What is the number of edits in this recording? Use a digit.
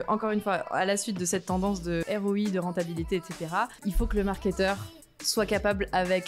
2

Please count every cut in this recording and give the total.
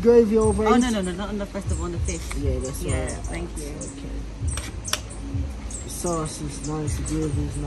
0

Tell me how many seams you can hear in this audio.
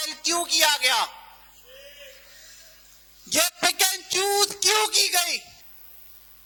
0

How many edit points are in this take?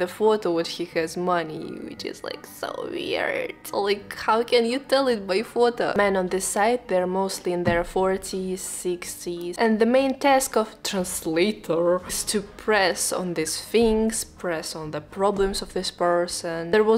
2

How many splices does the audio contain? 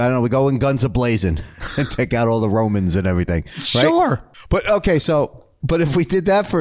1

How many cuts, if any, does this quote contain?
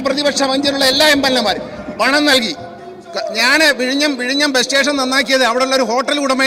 0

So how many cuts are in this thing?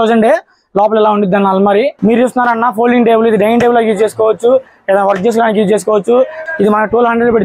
2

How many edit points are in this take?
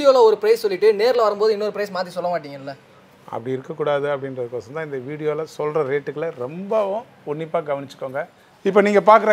1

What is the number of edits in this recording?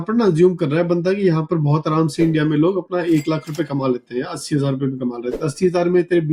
0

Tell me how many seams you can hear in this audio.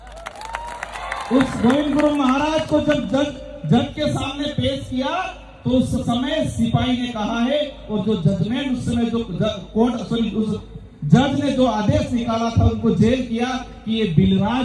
0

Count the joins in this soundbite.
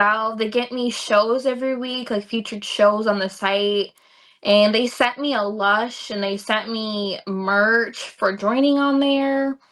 0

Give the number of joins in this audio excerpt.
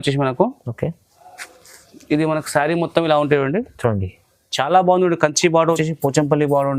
1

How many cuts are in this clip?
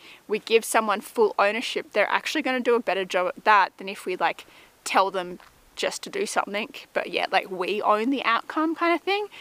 0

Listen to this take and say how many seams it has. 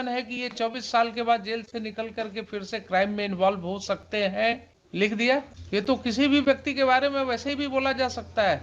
2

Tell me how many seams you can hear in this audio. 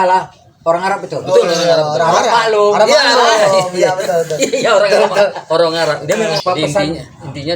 1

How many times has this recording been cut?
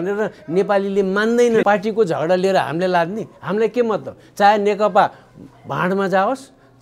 1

